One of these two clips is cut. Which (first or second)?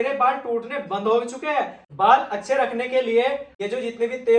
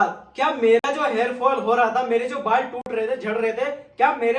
first